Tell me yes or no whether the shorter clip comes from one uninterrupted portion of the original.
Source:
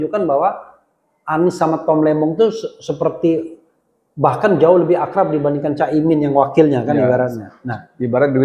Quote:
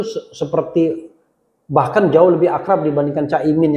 yes